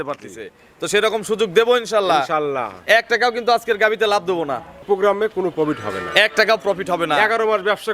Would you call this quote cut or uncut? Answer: cut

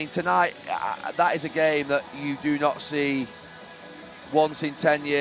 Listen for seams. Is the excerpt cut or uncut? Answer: uncut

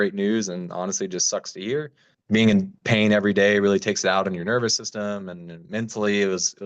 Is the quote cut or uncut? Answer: cut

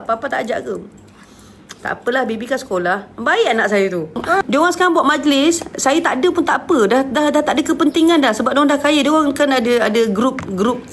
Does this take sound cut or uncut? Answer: cut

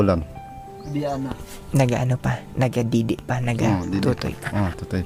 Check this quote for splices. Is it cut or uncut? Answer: uncut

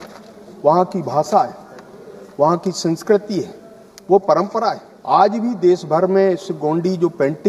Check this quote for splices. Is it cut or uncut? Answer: cut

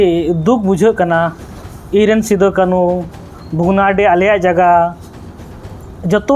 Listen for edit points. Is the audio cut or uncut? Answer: uncut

